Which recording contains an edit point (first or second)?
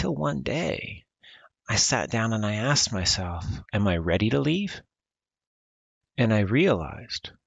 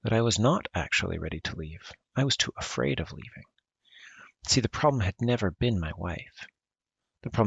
first